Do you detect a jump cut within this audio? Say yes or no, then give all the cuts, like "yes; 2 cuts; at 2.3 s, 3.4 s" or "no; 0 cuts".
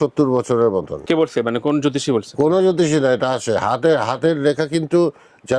yes; 1 cut; at 0.9 s